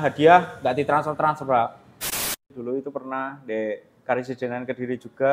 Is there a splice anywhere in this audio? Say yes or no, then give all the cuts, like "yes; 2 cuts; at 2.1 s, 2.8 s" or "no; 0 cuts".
yes; 1 cut; at 2.1 s